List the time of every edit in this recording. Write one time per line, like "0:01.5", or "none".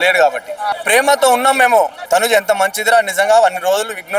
0:00.7
0:02.0